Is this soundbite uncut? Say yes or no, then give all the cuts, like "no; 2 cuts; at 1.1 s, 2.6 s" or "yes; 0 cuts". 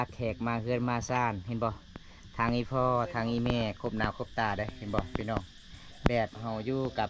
yes; 0 cuts